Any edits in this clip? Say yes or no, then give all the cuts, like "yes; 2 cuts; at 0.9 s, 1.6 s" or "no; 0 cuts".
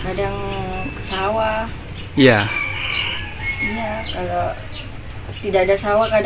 no; 0 cuts